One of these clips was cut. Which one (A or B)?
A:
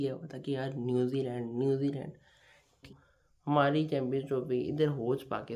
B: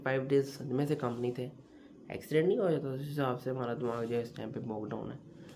A